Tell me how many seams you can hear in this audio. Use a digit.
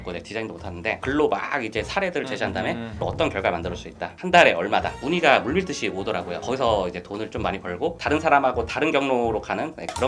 2